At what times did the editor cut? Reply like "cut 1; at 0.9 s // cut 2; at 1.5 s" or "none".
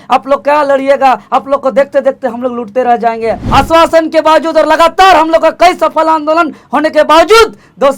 cut 1; at 3.4 s